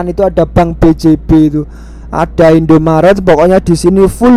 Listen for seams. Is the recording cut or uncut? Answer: uncut